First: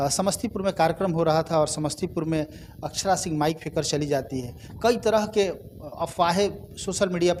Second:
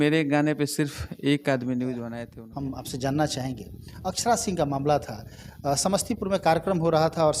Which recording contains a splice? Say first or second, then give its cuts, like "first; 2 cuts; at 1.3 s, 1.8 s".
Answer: second; 1 cut; at 2.2 s